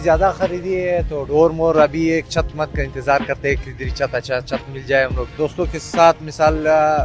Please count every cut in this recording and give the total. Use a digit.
1